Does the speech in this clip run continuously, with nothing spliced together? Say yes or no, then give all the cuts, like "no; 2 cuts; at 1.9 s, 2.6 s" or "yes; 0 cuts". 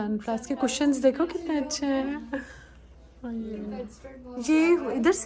yes; 0 cuts